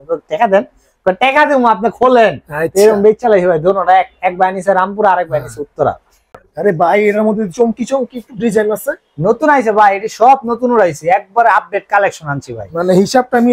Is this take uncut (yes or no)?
no